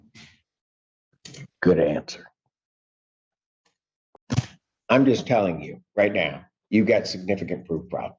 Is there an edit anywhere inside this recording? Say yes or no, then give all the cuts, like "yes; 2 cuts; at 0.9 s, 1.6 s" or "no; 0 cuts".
no; 0 cuts